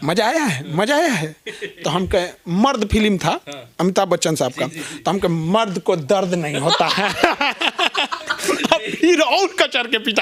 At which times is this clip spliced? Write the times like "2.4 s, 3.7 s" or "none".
none